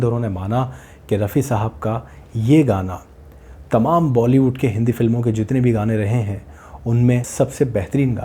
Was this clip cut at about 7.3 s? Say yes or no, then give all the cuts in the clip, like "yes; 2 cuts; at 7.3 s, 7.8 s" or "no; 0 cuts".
yes; 1 cut; at 7.3 s